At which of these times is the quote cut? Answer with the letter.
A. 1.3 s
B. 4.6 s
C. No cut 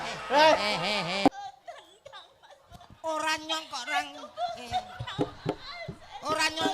A